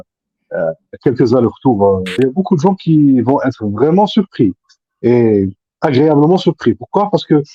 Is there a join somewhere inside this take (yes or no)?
yes